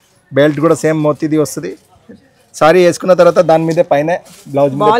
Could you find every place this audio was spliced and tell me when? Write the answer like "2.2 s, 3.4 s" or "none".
none